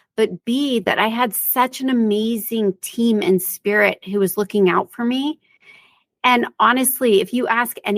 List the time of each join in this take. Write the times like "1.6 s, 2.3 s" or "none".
none